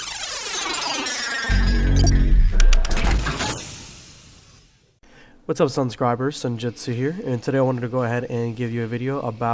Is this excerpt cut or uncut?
uncut